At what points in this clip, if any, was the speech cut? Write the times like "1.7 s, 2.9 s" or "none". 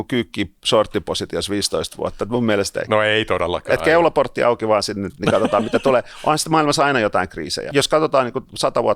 2.8 s, 7.6 s